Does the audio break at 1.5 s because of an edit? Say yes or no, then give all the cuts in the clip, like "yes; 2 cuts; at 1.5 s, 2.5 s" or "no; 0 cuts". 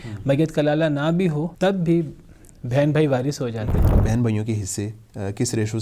yes; 2 cuts; at 1.5 s, 3.9 s